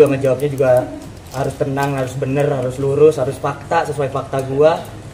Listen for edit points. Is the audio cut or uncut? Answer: uncut